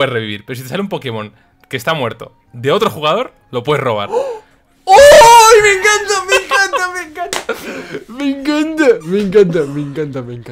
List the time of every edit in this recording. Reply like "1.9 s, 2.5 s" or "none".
none